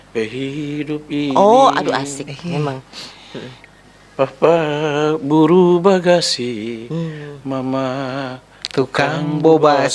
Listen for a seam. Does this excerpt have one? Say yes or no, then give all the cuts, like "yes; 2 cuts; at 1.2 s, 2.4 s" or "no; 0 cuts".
no; 0 cuts